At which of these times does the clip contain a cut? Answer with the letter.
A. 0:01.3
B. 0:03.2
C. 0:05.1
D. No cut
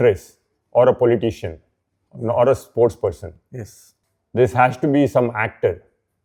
D